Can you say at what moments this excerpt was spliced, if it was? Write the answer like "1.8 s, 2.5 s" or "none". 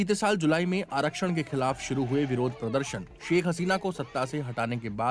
none